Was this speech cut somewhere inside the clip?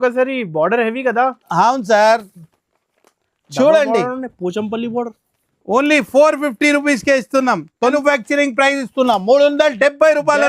yes; 1 cut; at 7.9 s

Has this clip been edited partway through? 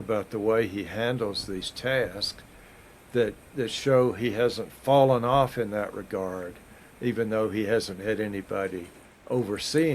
no; 0 cuts

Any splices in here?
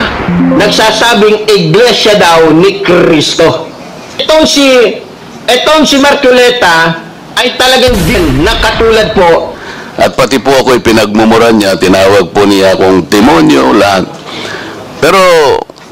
yes; 2 cuts; at 8.1 s, 9.6 s

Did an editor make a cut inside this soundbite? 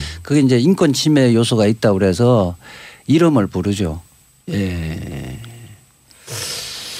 no; 0 cuts

